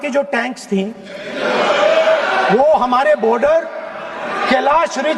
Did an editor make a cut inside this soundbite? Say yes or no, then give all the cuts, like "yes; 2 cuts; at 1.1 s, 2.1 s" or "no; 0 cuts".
no; 0 cuts